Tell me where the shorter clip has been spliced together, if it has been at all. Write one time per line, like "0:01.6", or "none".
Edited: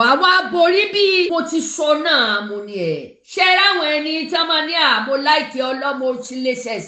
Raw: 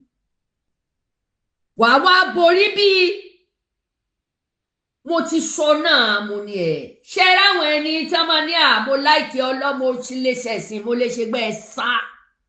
0:01.3

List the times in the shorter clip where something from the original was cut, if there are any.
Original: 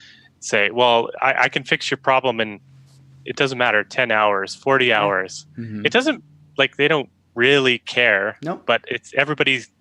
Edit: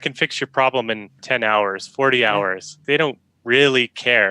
0:01.2
0:02.8

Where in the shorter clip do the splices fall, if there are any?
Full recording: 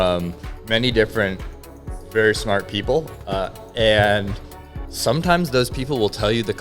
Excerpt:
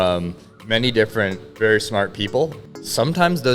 0:01.4
0:02.6

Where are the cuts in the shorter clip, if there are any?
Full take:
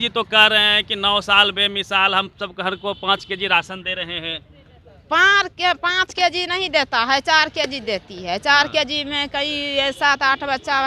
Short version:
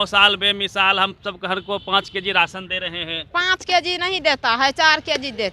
0:03.3

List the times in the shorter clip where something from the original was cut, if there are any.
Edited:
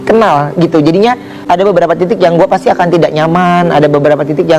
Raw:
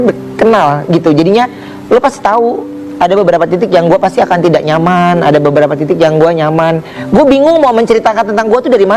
0:01.3

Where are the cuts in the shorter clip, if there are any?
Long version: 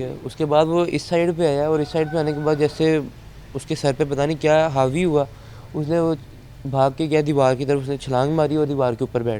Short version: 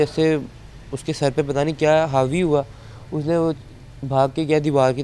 none

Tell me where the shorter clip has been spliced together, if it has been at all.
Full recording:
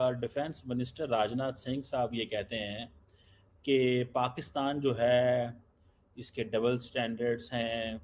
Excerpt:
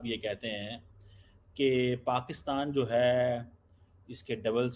none

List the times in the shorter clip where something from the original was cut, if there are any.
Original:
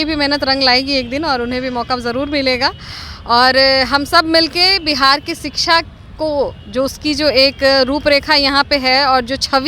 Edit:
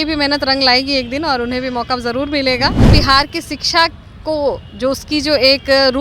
0:02.8

